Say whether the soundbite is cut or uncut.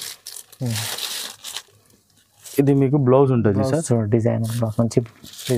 uncut